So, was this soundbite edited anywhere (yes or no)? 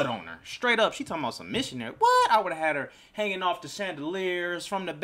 no